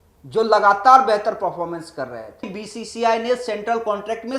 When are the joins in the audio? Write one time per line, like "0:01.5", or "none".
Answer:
0:02.6